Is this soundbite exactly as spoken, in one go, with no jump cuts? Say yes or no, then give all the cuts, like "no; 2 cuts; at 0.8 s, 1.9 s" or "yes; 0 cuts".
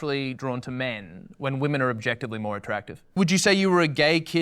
no; 1 cut; at 3.1 s